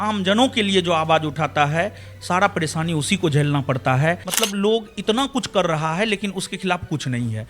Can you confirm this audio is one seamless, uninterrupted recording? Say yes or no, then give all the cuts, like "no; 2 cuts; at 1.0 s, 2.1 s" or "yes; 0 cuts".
no; 1 cut; at 4.3 s